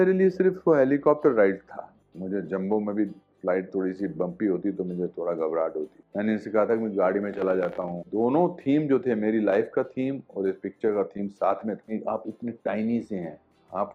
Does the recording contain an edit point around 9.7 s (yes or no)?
no